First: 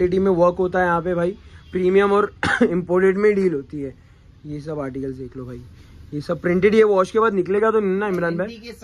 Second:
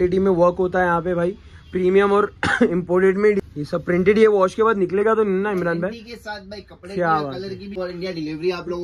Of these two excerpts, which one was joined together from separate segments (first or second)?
second